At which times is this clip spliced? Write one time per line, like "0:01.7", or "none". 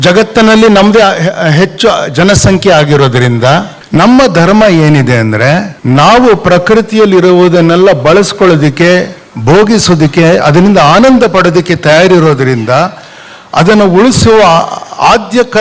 0:03.8
0:05.7